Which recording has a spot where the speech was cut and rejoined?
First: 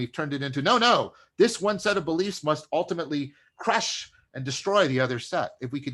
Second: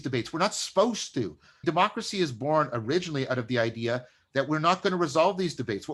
second; 1 cut; at 1.5 s

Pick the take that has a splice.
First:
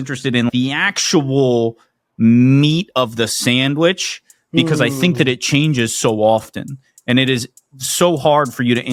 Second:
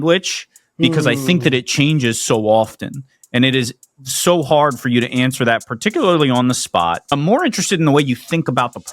second; 1 cut; at 7.1 s

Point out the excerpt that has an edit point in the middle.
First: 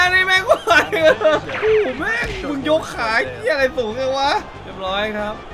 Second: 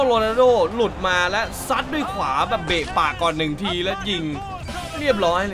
first; 2 cuts; at 1.5 s, 4.6 s

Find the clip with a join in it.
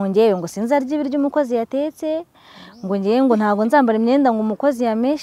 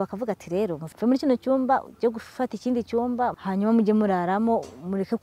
second; 2 cuts; at 0.8 s, 3.4 s

